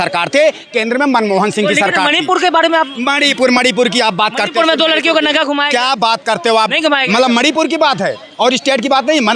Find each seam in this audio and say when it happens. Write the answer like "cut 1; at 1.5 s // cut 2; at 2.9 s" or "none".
none